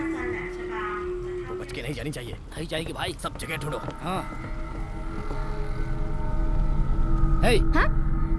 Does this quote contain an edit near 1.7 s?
yes; 1 cut; at 1.7 s

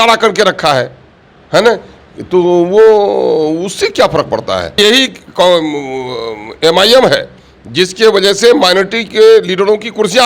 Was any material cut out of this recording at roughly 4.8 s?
yes; 1 cut; at 4.8 s

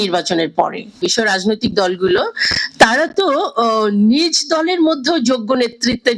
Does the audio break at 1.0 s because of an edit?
yes; 1 cut; at 1.0 s

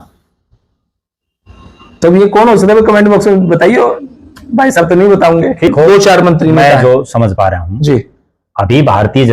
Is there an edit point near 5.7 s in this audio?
yes; 1 cut; at 5.7 s

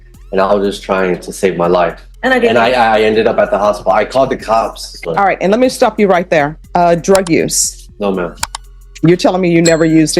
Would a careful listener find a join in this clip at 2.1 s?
yes; 3 cuts; at 2.1 s, 4.9 s, 6.6 s

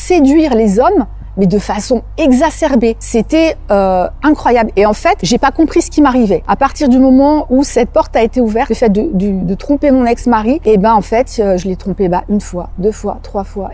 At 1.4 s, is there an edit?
no; 5 cuts; at 3.0 s, 5.2 s, 6.5 s, 8.7 s, 10.6 s

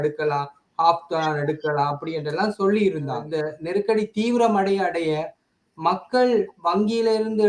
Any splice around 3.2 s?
yes; 1 cut; at 3.2 s

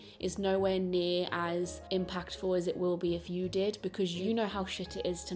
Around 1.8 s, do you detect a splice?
yes; 2 cuts; at 1.8 s, 4.2 s

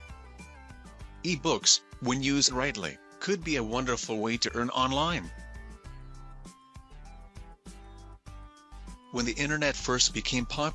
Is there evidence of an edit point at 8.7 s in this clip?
yes; 3 cuts; at 1.2 s, 5.3 s, 8.7 s

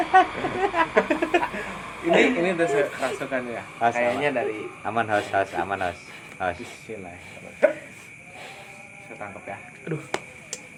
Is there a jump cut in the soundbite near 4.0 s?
no; 0 cuts

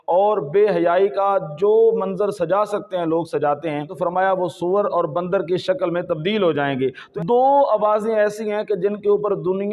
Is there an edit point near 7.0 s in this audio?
yes; 2 cuts; at 3.9 s, 7.0 s

